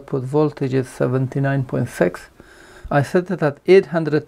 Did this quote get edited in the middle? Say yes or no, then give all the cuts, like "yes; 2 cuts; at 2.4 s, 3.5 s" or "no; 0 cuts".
yes; 1 cut; at 2.8 s